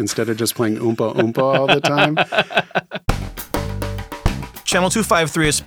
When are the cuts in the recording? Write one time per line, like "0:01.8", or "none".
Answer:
0:03.1

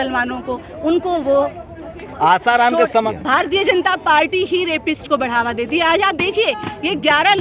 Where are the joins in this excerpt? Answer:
0:03.1

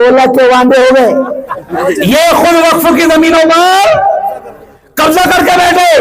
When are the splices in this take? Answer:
0:01.8

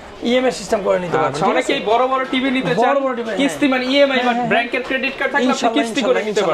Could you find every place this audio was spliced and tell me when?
none

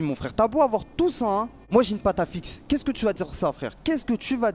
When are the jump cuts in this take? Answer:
0:01.6

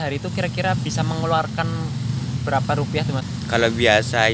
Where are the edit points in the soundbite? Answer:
0:03.2

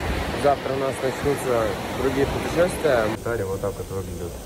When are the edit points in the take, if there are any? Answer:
0:03.1

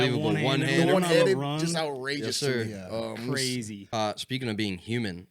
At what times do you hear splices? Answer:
0:03.8

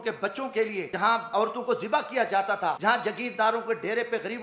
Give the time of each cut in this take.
0:01.1
0:02.8

